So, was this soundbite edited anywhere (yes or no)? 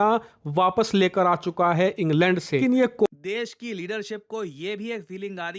yes